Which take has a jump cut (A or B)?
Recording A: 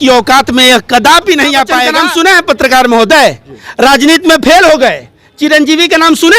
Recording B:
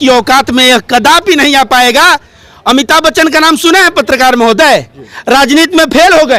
A